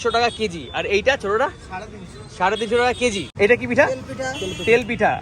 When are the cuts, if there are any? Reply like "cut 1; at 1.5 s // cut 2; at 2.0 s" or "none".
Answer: cut 1; at 3.2 s